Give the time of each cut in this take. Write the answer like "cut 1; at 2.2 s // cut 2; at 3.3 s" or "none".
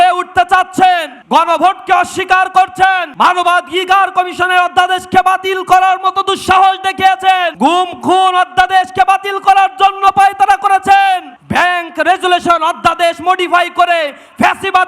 cut 1; at 1.1 s // cut 2; at 3.1 s // cut 3; at 7.5 s // cut 4; at 11.4 s